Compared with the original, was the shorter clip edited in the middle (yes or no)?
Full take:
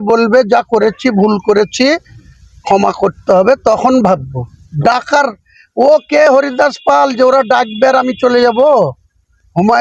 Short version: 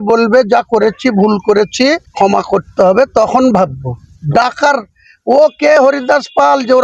yes